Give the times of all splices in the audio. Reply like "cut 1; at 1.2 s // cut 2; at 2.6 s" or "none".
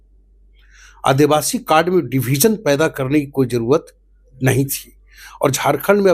none